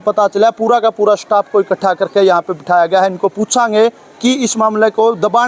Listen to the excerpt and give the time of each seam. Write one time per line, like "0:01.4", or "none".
none